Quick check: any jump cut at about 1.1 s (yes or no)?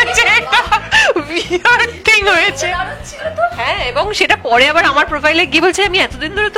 no